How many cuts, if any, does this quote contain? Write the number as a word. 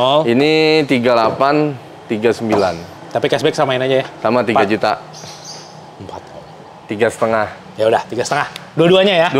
zero